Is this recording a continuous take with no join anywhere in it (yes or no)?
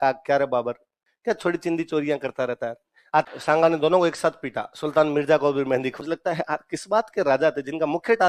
no